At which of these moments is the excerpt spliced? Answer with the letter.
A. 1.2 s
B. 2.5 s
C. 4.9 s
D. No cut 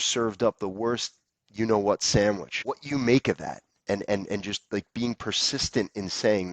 B